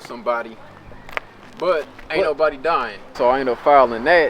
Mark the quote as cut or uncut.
cut